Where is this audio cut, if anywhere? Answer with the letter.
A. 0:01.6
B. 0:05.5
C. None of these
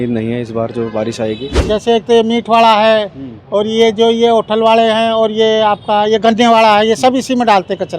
A